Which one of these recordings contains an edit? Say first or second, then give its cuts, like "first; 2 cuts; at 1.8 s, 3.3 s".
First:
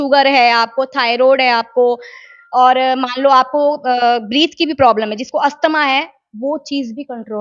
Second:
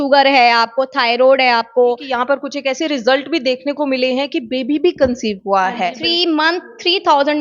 second; 2 cuts; at 2.1 s, 6.0 s